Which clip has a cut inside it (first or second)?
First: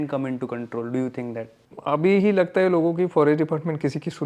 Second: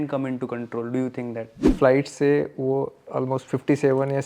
second